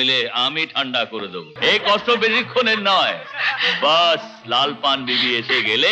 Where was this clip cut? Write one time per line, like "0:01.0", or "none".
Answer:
0:01.4